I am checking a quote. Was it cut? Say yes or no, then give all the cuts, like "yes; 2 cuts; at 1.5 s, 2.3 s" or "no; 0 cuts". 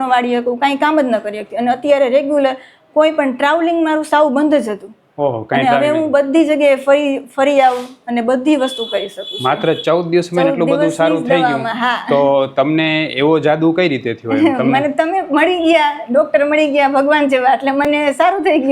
no; 0 cuts